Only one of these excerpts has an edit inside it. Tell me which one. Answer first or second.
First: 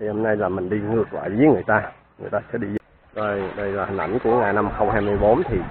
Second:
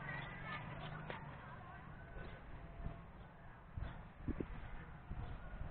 first